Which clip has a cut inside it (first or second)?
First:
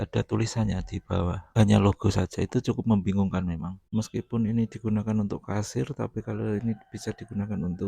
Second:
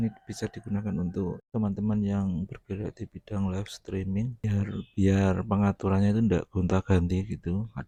first